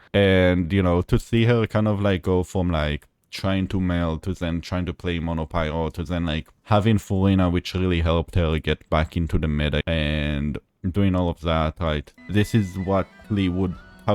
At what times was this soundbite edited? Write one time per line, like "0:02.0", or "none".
0:09.8
0:12.1